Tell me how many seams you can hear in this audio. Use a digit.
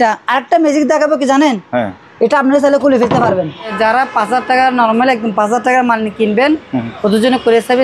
1